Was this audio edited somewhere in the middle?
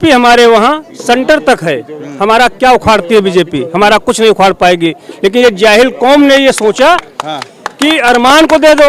no; 0 cuts

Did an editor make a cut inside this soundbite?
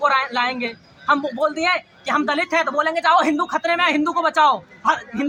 no; 0 cuts

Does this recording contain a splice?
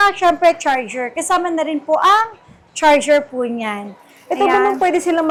no; 0 cuts

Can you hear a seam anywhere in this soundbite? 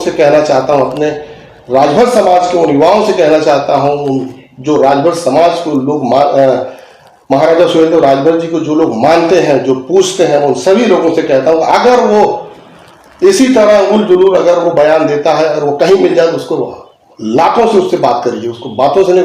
no; 0 cuts

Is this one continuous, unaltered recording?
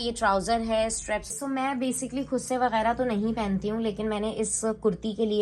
no; 1 cut; at 1.3 s

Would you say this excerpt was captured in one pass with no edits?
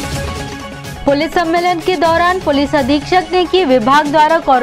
no; 1 cut; at 0.9 s

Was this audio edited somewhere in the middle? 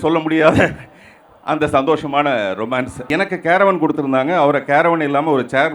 yes; 1 cut; at 3.0 s

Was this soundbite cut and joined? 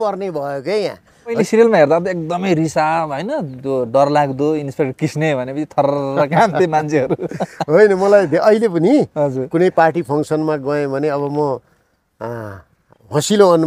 yes; 1 cut; at 1.4 s

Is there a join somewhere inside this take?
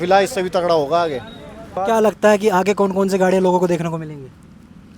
yes; 1 cut; at 1.8 s

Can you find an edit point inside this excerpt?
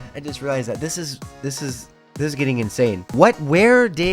yes; 1 cut; at 3.1 s

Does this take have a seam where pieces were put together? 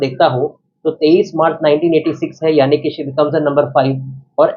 no; 0 cuts

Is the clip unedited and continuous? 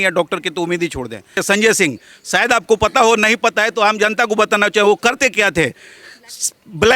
no; 1 cut; at 1.4 s

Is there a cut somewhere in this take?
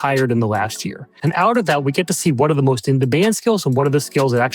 yes; 1 cut; at 1.1 s

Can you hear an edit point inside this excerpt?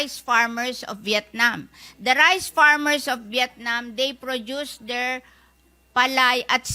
no; 0 cuts

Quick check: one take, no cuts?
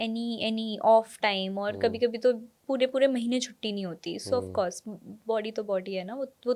yes; 0 cuts

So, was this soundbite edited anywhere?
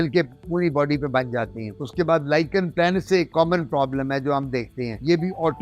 no; 0 cuts

